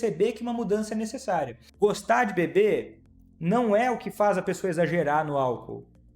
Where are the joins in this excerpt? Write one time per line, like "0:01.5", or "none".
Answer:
0:01.6

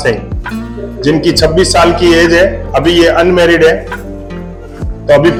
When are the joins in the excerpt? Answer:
none

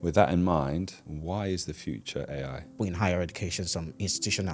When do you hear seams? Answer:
0:01.1
0:02.8

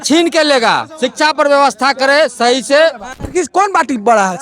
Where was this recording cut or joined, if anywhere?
0:03.2

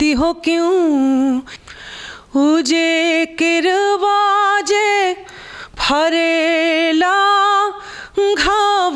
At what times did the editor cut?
0:01.5

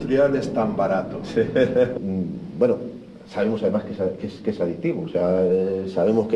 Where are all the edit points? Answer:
0:01.9

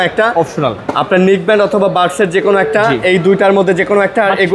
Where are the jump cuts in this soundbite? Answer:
none

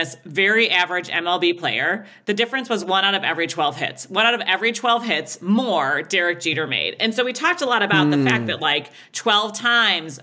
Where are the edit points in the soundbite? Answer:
none

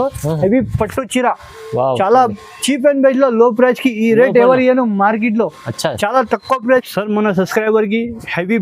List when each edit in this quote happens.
0:06.7

